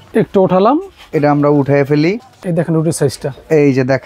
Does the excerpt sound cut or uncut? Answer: cut